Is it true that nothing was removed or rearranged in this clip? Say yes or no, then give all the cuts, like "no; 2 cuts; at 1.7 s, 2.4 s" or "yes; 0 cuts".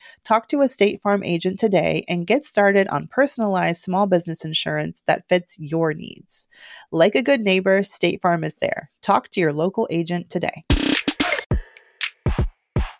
no; 1 cut; at 11.4 s